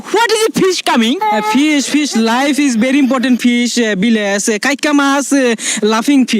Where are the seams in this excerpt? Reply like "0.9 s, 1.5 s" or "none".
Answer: none